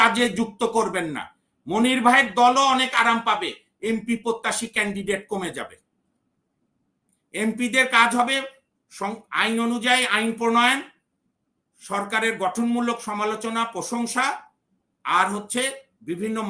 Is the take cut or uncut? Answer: uncut